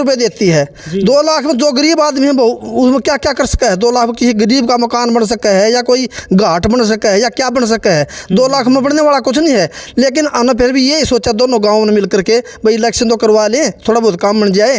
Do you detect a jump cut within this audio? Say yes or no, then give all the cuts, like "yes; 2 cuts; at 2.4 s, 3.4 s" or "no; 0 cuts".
no; 0 cuts